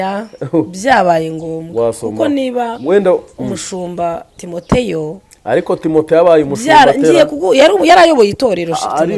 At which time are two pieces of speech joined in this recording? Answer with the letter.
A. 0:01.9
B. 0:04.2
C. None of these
C